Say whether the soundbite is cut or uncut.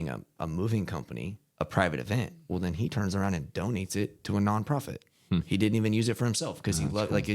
cut